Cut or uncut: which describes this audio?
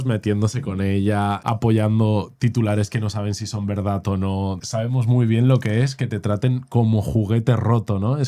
cut